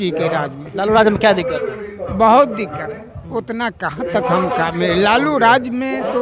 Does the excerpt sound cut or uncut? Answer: uncut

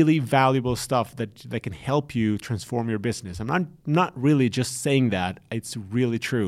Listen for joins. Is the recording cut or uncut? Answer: uncut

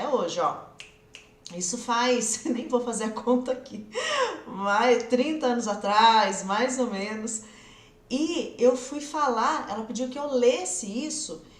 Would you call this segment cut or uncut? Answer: uncut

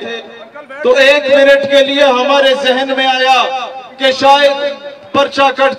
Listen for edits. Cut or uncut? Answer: uncut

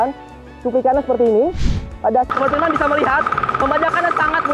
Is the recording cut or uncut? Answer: cut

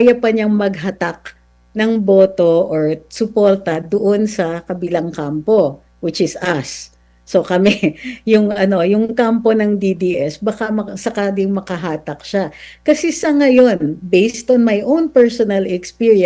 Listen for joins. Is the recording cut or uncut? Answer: uncut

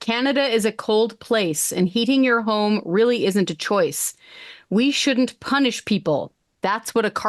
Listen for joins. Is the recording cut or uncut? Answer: uncut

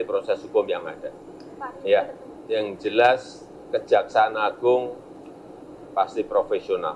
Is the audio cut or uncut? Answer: cut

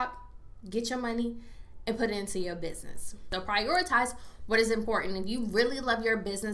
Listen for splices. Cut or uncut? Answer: cut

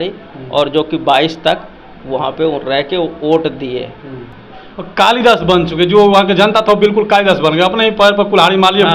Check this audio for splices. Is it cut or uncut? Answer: uncut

